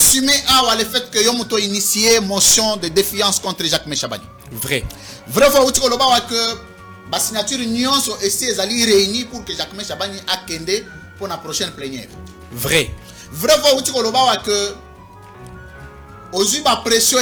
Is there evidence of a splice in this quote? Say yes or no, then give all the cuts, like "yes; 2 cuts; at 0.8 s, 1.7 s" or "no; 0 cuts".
no; 0 cuts